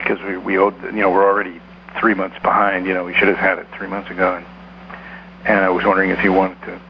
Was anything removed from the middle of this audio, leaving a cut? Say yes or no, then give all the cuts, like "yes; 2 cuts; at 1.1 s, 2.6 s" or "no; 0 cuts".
no; 0 cuts